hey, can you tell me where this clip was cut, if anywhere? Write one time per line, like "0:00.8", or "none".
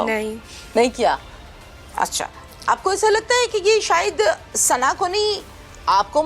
none